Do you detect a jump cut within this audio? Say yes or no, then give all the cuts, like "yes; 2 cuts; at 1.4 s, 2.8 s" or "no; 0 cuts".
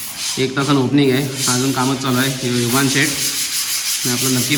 no; 0 cuts